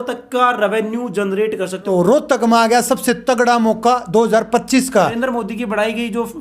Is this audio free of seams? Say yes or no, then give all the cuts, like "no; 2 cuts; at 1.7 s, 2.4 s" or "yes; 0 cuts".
no; 2 cuts; at 1.8 s, 5.1 s